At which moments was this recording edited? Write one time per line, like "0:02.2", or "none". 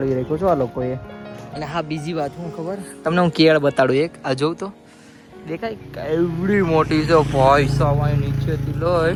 none